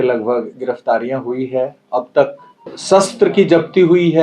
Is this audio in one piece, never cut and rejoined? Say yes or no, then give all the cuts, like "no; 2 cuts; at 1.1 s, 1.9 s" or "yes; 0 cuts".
no; 1 cut; at 2.8 s